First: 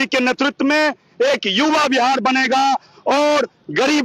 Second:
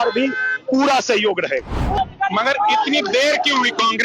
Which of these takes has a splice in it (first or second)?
second